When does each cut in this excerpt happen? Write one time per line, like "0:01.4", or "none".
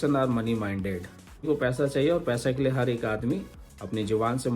0:01.4